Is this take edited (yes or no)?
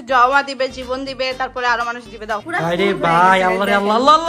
yes